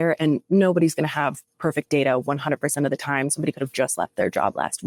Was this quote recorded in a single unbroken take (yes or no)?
yes